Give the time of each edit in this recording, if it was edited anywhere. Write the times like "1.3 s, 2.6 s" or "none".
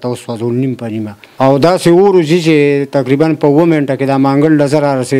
1.2 s